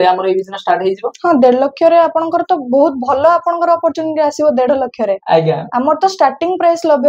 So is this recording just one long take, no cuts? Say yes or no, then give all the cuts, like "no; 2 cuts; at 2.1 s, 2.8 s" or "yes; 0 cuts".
yes; 0 cuts